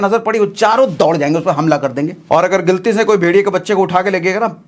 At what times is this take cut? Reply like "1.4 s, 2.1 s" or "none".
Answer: 2.2 s